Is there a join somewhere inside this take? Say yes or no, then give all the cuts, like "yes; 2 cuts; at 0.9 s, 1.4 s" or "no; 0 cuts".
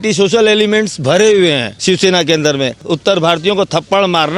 yes; 1 cut; at 2.8 s